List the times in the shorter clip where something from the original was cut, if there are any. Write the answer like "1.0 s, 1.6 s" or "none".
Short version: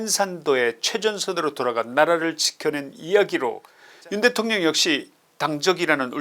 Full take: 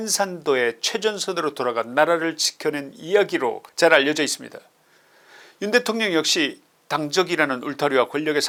3.7 s